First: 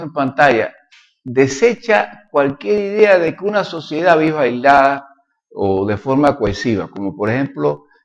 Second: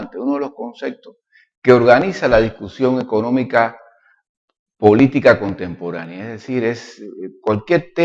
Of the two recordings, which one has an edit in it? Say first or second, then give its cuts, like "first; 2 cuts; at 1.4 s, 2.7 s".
second; 1 cut; at 5.6 s